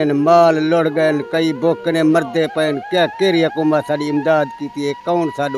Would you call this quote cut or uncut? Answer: uncut